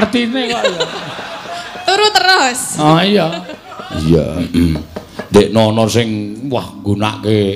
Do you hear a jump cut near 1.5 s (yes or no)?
no